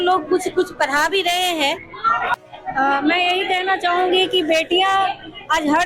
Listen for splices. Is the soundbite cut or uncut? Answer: cut